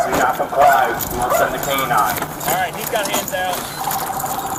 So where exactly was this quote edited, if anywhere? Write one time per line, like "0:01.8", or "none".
none